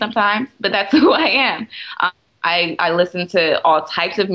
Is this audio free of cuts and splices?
yes; 0 cuts

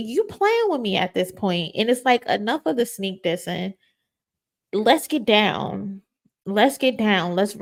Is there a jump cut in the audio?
no; 0 cuts

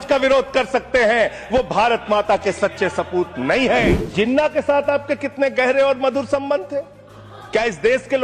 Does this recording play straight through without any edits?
no; 1 cut; at 4.0 s

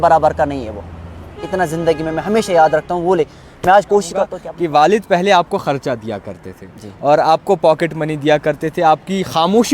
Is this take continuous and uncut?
no; 1 cut; at 4.4 s

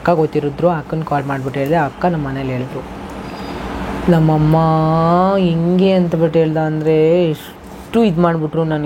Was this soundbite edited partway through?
no; 0 cuts

